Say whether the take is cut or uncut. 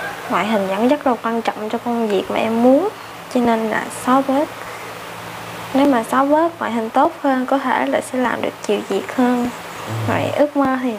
uncut